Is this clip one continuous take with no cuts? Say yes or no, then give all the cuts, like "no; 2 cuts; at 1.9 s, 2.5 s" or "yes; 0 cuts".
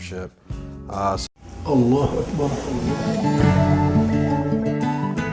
yes; 0 cuts